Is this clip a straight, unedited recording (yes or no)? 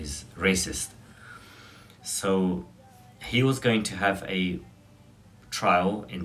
yes